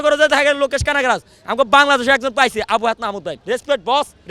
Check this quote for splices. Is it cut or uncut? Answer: cut